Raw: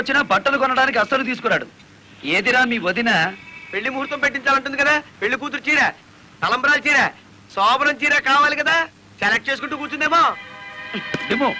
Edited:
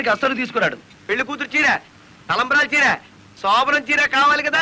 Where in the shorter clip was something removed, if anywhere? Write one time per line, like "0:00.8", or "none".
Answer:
0:01.0